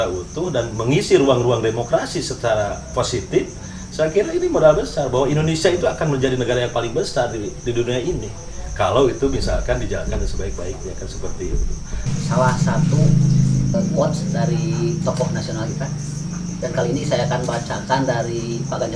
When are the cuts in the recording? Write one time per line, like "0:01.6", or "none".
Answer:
0:12.1
0:13.7